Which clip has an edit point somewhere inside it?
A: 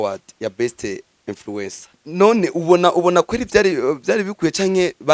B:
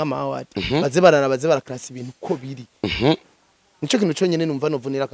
A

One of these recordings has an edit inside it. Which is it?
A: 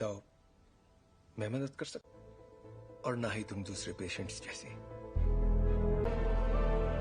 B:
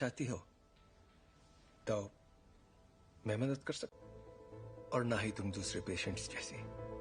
A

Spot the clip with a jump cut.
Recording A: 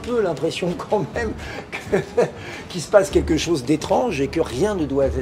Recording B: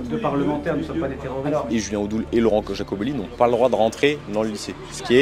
B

